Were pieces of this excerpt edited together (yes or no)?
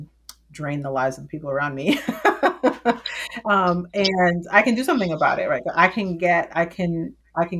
no